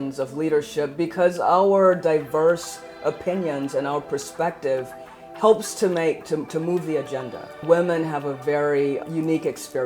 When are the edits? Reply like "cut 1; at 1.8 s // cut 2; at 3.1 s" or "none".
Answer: cut 1; at 7.6 s // cut 2; at 9.0 s